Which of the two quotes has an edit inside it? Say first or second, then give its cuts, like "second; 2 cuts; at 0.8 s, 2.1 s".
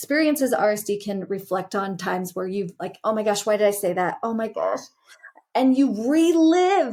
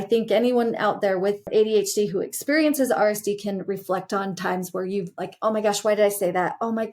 second; 1 cut; at 1.4 s